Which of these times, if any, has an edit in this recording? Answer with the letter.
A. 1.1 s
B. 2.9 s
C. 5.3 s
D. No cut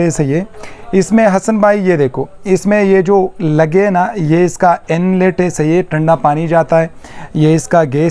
D